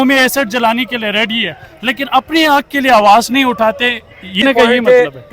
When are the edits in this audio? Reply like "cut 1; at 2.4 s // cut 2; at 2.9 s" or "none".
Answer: cut 1; at 4.4 s

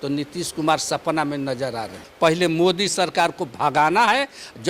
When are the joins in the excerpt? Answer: cut 1; at 2.1 s

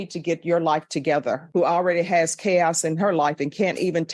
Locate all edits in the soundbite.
cut 1; at 1.4 s

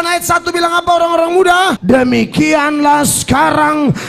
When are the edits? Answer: cut 1; at 1.8 s

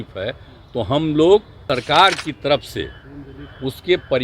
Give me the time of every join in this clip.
cut 1; at 1.5 s

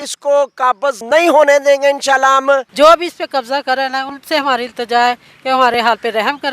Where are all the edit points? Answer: cut 1; at 1.0 s // cut 2; at 2.7 s

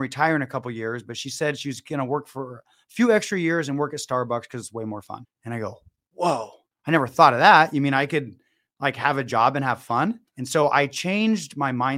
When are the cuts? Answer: cut 1; at 10.3 s

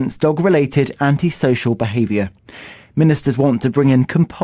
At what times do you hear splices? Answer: none

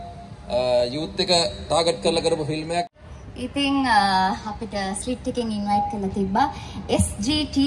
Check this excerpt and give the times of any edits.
cut 1; at 2.9 s

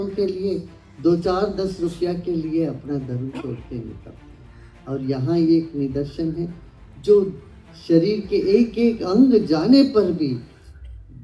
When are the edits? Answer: none

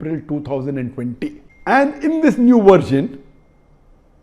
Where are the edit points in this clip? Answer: cut 1; at 1.5 s

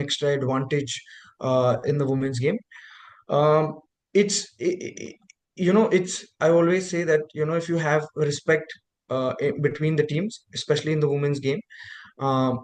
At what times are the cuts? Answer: none

